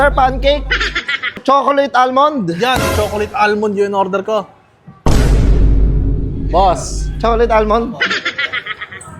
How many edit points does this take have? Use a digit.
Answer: 1